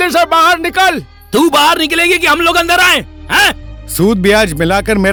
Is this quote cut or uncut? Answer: uncut